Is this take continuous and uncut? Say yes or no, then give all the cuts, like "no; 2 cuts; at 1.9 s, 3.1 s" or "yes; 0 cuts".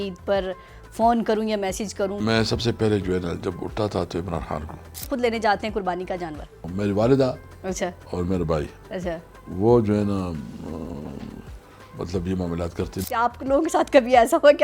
no; 4 cuts; at 2.2 s, 5.0 s, 6.6 s, 13.0 s